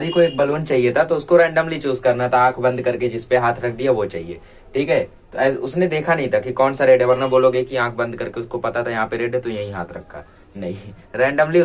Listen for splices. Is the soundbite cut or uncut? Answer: uncut